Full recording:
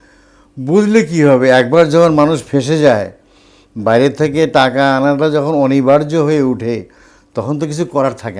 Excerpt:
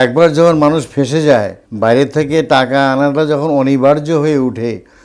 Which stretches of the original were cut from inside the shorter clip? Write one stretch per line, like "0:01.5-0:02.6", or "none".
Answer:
0:03.2-0:03.7